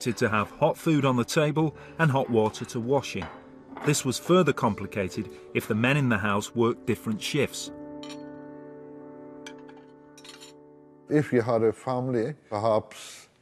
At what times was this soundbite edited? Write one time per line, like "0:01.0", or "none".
0:01.5